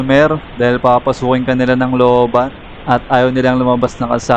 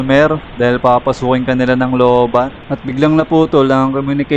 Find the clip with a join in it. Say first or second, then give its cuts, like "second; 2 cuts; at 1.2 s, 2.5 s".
second; 1 cut; at 2.7 s